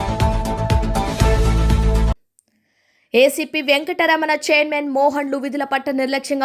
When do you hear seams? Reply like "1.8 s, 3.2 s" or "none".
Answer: none